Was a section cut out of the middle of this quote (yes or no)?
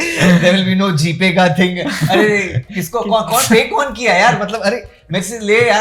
no